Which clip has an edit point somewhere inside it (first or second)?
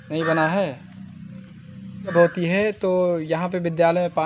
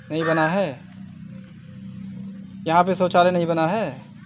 first